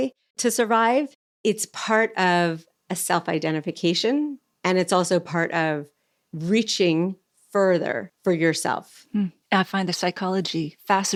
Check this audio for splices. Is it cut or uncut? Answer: uncut